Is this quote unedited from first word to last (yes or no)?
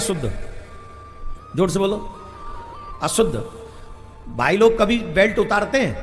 yes